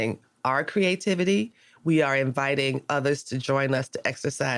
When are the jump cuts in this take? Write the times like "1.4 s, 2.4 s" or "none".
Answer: none

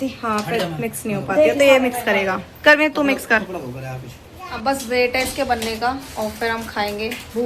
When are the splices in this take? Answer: none

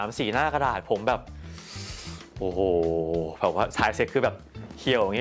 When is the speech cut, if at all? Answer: none

